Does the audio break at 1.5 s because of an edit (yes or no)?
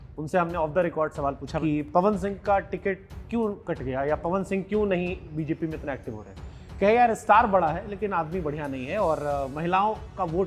yes